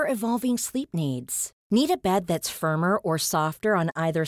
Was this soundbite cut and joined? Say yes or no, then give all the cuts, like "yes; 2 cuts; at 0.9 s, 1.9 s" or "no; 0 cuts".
no; 0 cuts